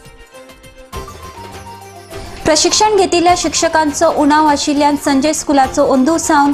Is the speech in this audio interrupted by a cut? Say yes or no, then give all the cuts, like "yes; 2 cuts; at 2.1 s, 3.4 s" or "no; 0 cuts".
yes; 1 cut; at 1.6 s